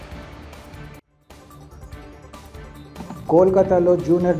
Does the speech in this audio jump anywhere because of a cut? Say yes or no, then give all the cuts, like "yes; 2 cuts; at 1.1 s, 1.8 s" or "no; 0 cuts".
yes; 1 cut; at 2.9 s